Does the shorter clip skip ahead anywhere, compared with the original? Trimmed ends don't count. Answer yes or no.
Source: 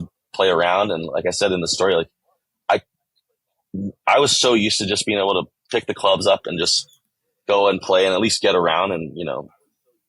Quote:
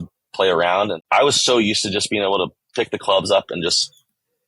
yes